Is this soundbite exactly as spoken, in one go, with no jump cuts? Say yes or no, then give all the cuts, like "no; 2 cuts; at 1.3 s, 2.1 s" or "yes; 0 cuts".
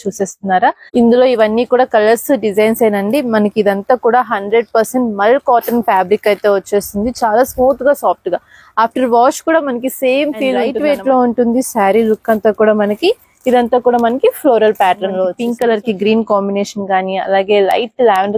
no; 3 cuts; at 0.8 s, 10.7 s, 15.4 s